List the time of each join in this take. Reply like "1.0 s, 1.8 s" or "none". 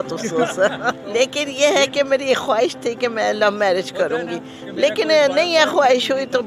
1.0 s

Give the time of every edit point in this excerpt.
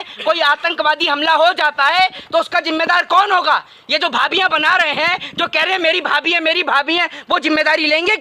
none

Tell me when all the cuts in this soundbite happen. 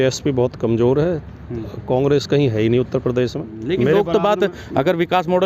3.5 s

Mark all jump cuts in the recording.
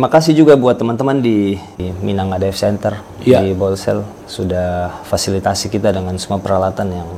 1.8 s

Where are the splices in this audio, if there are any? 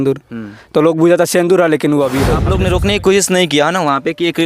2.4 s

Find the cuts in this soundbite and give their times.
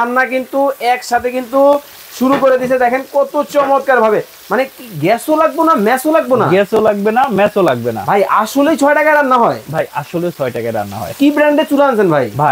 none

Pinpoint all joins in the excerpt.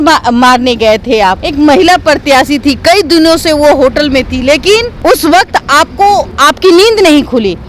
1.4 s, 4.9 s, 6.3 s

